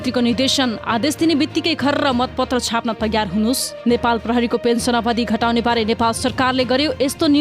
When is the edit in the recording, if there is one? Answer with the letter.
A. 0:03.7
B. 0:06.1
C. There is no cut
A